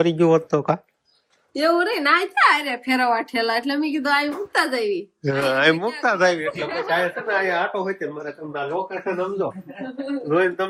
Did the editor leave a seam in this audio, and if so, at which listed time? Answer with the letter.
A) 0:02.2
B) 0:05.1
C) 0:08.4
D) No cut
D